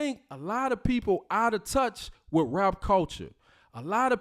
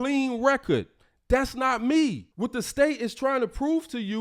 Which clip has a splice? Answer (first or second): second